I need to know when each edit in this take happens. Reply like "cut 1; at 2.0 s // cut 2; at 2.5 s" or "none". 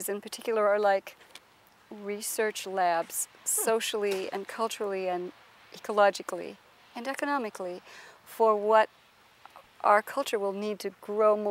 none